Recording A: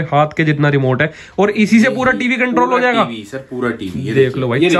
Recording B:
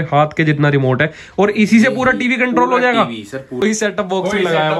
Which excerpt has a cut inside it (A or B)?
B